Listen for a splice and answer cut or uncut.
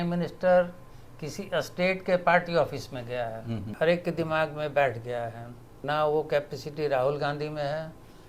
cut